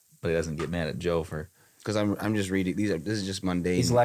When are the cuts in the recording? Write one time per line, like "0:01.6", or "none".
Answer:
0:01.6